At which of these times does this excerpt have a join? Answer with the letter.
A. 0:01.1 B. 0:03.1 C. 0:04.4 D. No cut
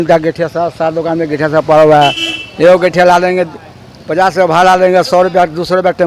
D